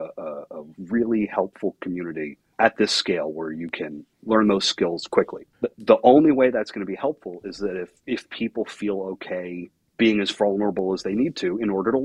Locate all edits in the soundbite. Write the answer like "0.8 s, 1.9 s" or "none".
2.4 s, 4.1 s, 5.4 s, 8.0 s, 9.8 s